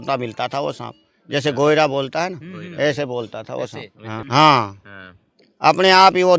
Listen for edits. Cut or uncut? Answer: cut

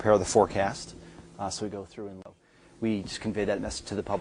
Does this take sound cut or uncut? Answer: cut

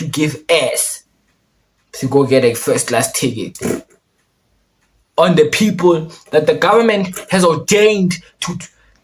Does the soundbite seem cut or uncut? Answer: uncut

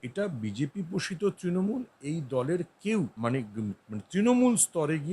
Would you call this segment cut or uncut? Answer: cut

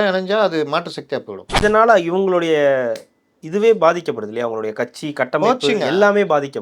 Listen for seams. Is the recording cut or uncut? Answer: cut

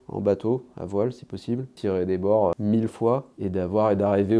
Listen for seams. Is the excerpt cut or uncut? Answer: cut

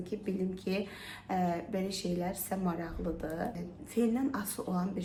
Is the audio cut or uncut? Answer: uncut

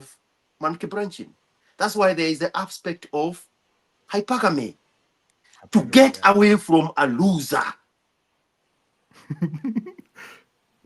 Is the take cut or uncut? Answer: uncut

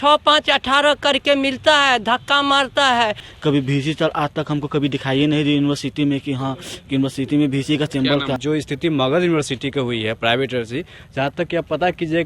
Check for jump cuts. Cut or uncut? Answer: cut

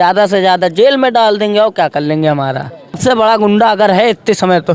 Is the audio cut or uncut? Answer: cut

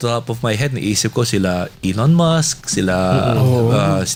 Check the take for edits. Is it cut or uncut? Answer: uncut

